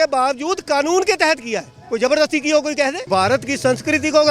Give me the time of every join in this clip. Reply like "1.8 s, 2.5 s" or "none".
3.0 s